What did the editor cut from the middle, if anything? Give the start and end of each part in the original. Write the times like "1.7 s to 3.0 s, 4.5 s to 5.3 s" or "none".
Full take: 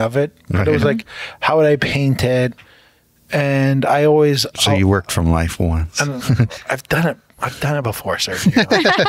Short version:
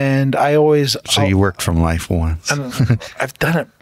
none